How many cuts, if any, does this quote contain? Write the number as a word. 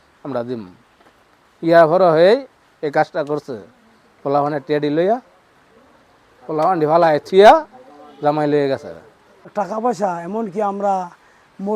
one